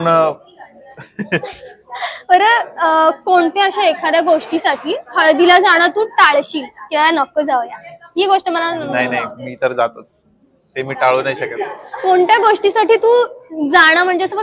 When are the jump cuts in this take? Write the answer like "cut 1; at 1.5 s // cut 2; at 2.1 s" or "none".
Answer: none